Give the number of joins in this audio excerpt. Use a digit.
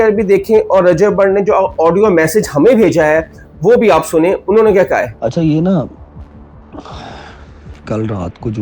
1